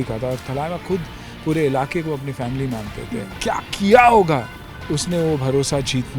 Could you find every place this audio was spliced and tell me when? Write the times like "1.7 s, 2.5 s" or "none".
3.3 s